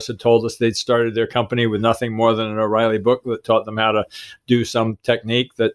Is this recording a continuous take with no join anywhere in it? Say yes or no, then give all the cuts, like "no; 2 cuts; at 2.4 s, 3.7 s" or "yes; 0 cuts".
yes; 0 cuts